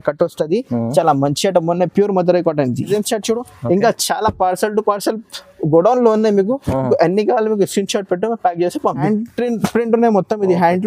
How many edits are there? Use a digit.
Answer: 2